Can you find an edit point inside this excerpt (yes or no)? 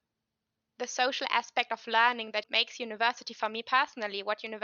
yes